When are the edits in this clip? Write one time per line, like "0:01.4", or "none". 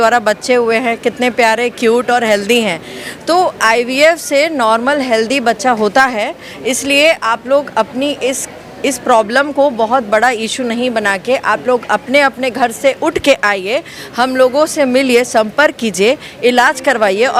none